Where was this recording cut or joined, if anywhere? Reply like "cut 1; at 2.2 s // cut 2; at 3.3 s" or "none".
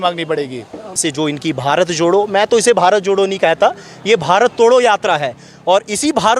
cut 1; at 1.0 s